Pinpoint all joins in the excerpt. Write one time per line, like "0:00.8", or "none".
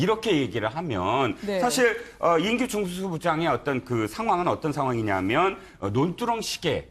none